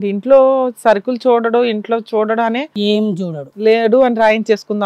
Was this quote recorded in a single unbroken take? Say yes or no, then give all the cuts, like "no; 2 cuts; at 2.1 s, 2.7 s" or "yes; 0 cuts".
yes; 0 cuts